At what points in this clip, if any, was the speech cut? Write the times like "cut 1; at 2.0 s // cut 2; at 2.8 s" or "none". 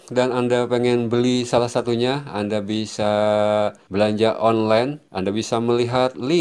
cut 1; at 3.8 s // cut 2; at 5.0 s